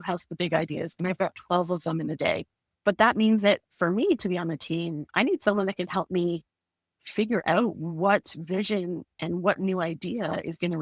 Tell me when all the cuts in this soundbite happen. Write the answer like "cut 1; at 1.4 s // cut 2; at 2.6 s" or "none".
none